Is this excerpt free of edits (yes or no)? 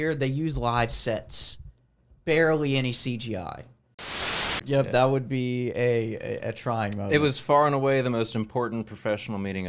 no